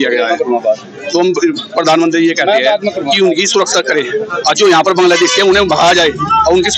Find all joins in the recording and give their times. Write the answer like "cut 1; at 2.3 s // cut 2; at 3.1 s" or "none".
none

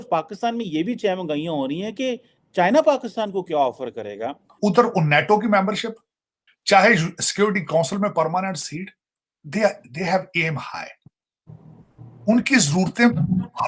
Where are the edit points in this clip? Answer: cut 1; at 4.5 s

